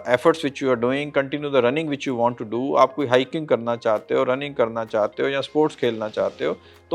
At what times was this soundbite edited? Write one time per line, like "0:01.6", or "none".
none